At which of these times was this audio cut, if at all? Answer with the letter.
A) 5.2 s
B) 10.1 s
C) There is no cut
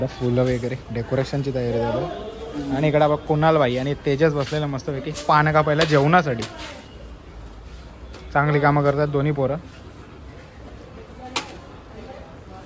C